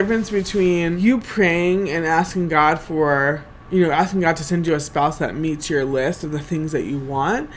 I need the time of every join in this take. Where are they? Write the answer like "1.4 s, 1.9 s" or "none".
1.0 s